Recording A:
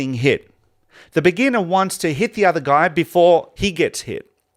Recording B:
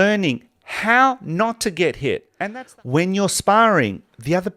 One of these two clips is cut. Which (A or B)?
B